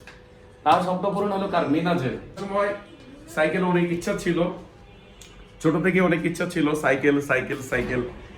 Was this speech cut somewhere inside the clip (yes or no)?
yes